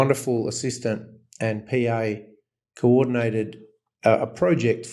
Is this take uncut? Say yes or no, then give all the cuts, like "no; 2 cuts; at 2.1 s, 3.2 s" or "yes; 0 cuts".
yes; 0 cuts